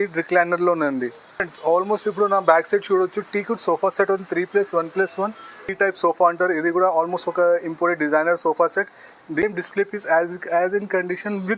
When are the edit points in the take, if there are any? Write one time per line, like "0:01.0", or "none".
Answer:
0:01.3
0:05.6
0:09.4